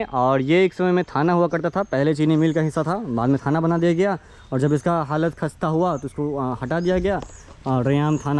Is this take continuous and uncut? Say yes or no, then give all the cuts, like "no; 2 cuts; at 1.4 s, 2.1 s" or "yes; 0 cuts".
yes; 0 cuts